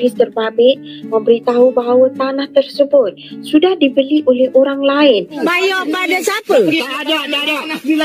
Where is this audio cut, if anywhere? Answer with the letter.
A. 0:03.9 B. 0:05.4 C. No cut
B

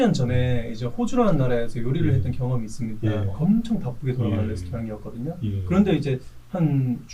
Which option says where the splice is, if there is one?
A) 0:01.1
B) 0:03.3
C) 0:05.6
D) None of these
B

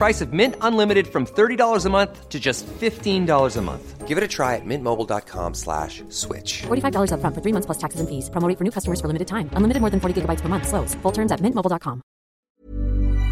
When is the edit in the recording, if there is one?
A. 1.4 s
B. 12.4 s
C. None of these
B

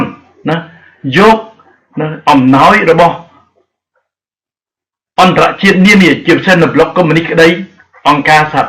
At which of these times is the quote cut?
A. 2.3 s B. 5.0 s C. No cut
A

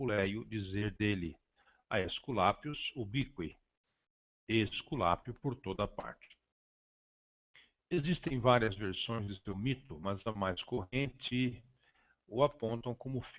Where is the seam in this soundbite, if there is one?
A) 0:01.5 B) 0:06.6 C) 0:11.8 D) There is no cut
A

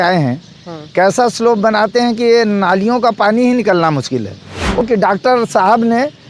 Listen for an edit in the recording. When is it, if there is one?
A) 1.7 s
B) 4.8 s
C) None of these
B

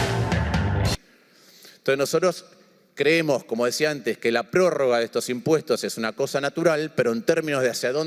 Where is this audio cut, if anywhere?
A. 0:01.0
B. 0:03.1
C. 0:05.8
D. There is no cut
A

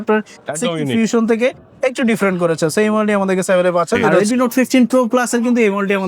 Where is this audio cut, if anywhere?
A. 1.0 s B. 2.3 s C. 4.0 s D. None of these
C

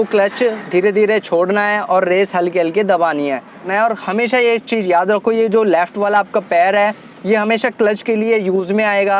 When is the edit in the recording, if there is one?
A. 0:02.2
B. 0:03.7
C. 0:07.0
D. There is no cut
B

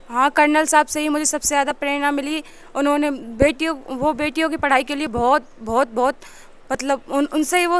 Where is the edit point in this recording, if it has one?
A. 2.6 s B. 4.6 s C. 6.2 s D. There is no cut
D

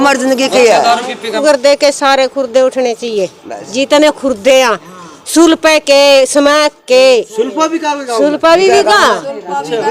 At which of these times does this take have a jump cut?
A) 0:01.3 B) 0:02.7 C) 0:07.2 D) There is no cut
A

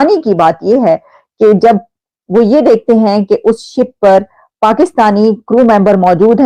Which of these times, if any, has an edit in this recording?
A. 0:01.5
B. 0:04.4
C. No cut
C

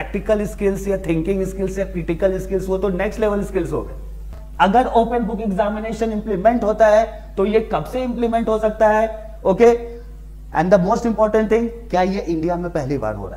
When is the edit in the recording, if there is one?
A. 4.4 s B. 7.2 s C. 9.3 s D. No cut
A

